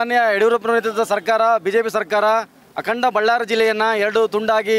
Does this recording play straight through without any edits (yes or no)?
yes